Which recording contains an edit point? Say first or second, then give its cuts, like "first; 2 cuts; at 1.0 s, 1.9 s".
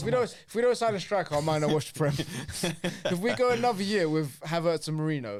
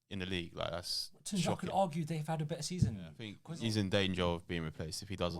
second; 1 cut; at 3.4 s